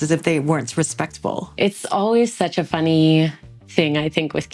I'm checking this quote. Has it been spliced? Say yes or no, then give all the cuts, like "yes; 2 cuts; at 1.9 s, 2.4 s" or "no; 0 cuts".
yes; 1 cut; at 1.5 s